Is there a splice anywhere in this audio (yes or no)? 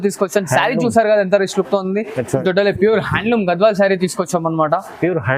yes